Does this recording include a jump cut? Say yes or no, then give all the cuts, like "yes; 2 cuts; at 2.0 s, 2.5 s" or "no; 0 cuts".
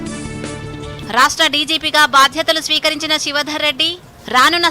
yes; 1 cut; at 0.9 s